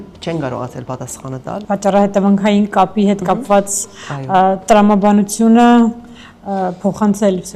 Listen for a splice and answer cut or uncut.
cut